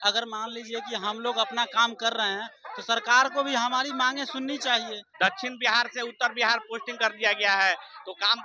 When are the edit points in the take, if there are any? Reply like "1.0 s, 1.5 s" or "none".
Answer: 5.0 s